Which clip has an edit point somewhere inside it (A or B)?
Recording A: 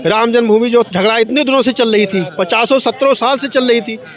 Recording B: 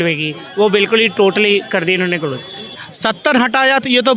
B